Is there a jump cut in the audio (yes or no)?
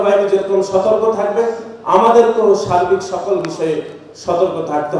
no